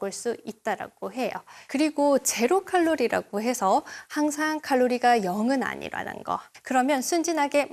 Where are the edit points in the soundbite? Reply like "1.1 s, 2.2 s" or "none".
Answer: 1.5 s, 6.5 s